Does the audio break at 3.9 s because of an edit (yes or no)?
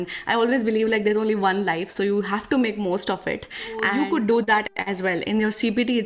yes